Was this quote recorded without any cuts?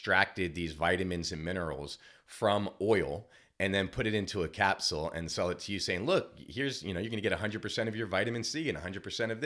yes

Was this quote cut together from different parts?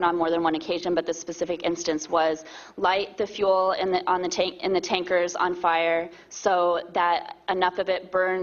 yes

